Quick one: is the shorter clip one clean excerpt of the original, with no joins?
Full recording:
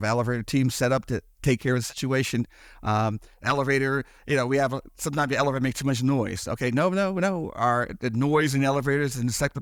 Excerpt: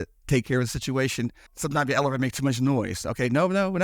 no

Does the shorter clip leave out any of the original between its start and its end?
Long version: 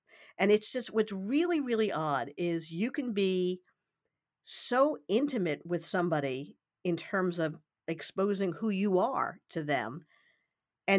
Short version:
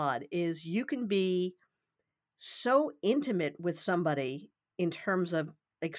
no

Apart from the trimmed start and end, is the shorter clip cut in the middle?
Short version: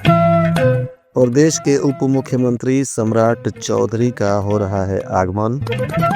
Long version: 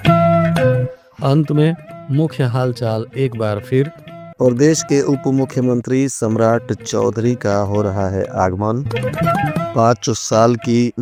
yes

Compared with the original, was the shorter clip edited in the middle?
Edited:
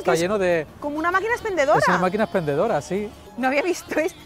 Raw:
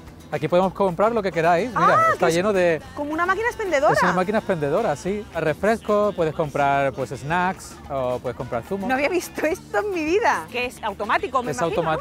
yes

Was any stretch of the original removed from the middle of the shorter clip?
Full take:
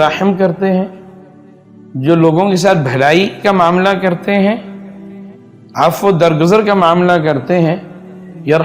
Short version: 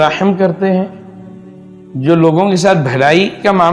no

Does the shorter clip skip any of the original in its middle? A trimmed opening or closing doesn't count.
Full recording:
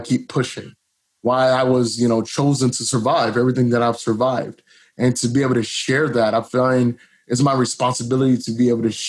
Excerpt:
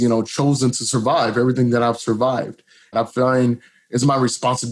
yes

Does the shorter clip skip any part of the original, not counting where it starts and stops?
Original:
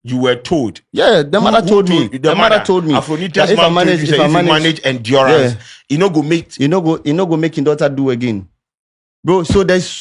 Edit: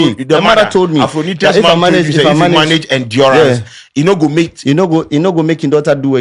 no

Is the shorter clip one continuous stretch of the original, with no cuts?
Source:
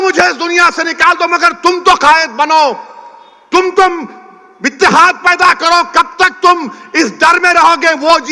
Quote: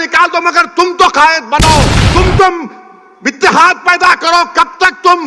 no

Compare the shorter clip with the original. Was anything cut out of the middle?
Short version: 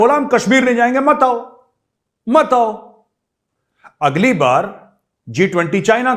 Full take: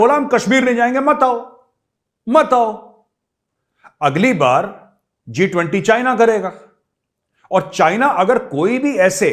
no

